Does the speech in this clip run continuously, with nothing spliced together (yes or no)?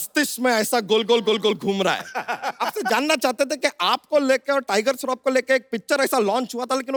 yes